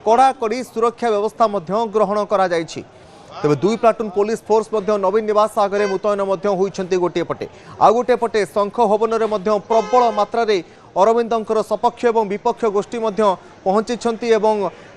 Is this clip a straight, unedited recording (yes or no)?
no